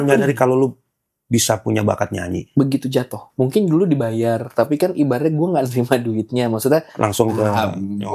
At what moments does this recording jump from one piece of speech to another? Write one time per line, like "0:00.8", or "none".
0:02.3
0:03.2